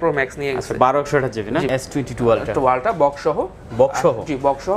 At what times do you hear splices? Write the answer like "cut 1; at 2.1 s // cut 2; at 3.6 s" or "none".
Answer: cut 1; at 1.7 s